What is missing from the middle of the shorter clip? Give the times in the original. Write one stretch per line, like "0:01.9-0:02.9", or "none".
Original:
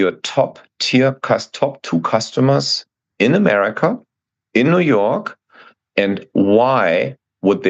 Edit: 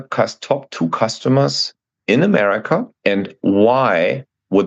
0:04.0-0:05.8